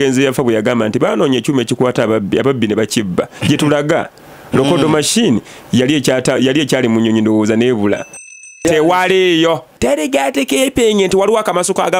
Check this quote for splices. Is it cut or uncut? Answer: cut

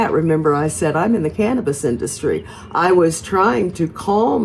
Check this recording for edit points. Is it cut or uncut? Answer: uncut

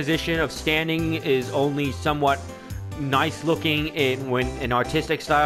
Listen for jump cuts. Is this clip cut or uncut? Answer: uncut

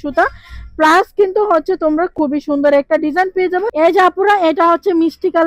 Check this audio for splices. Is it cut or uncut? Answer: cut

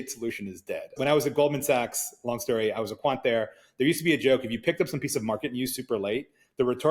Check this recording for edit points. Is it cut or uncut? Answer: cut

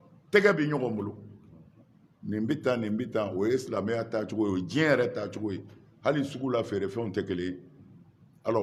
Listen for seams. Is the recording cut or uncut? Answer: uncut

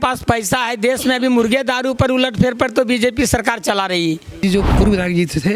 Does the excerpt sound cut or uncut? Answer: cut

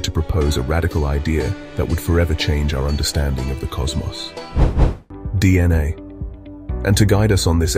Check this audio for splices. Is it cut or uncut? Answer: cut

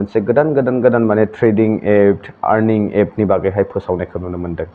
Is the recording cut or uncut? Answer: uncut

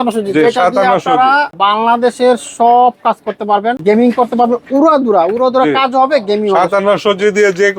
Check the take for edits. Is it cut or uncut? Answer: cut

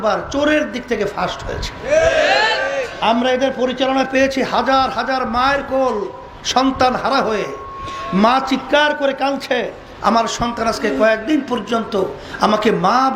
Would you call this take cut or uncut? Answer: uncut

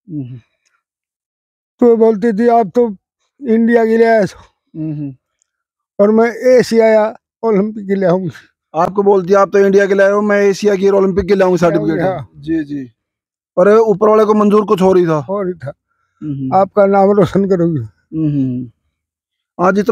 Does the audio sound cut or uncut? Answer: uncut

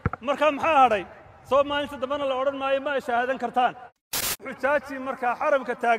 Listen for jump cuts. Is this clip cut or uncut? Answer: cut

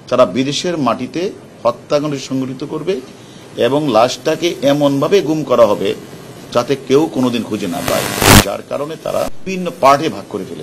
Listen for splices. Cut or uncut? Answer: cut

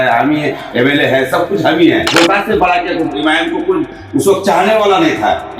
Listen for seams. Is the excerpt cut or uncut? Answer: cut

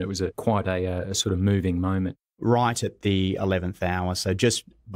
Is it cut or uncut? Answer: cut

